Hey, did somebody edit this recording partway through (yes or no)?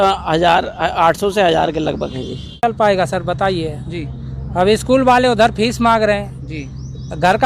yes